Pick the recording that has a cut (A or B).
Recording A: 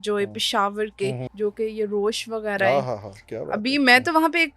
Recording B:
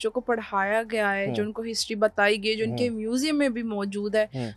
A